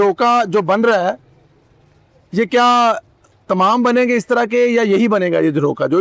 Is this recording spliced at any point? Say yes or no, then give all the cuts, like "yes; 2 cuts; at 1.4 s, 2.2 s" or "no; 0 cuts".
no; 0 cuts